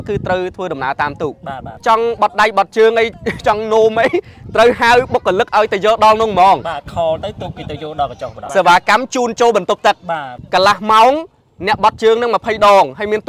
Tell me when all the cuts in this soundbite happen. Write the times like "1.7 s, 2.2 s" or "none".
1.8 s, 8.4 s, 10.3 s